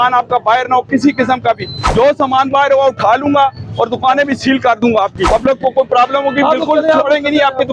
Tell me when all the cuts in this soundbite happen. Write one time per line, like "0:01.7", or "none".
0:01.7
0:05.2